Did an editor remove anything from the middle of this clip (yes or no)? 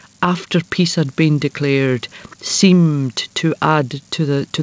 no